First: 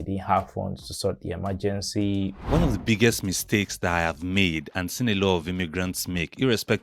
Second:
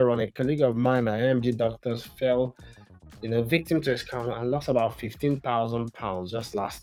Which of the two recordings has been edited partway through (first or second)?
first